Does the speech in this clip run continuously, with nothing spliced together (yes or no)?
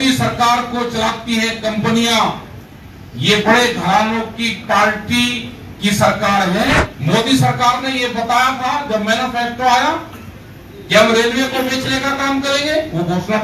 no